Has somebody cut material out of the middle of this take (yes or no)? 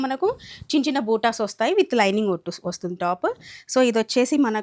no